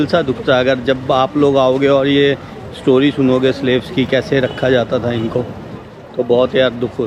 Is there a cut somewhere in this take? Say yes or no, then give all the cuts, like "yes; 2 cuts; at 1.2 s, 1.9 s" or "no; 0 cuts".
no; 0 cuts